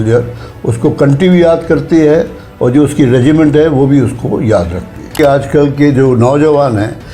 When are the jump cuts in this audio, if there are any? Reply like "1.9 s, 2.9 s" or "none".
5.1 s

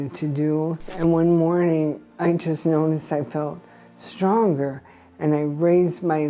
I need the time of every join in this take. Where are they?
0.9 s

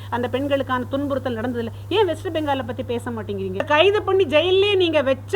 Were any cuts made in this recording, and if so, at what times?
3.6 s

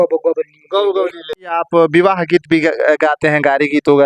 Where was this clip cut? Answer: none

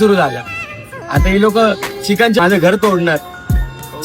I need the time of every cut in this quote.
2.4 s

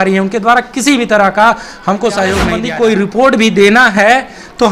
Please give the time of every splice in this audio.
2.6 s

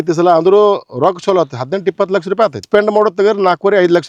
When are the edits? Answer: 2.7 s

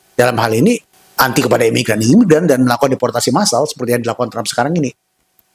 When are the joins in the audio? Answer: 1.0 s

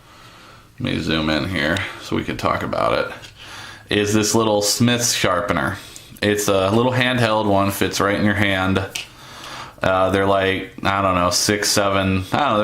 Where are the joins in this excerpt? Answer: 4.3 s

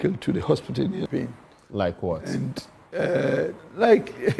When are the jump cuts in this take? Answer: 1.1 s

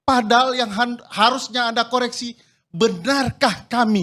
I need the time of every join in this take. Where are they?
none

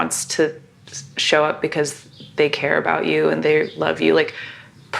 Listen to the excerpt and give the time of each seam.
3.4 s

